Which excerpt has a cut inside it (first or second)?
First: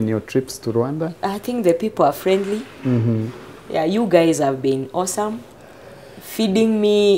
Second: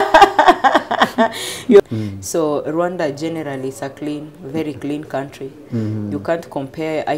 second